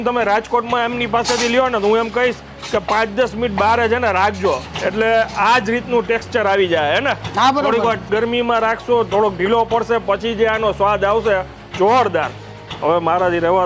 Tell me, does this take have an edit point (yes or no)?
no